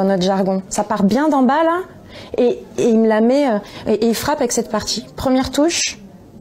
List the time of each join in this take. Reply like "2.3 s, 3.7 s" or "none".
5.0 s